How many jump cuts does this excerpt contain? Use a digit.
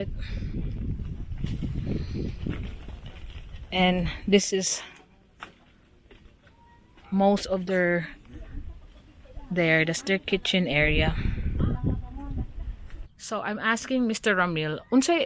1